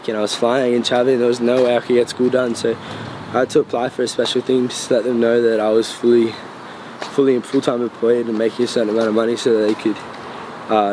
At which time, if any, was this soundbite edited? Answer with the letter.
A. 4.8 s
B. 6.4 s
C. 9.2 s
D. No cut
D